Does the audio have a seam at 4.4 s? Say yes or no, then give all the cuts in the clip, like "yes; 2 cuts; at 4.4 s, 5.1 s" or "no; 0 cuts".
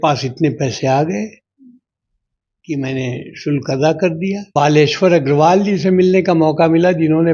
yes; 1 cut; at 4.4 s